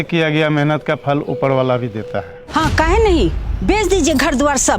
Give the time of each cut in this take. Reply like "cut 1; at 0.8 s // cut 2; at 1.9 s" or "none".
cut 1; at 2.4 s